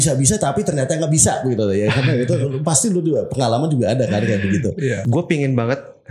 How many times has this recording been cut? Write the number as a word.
one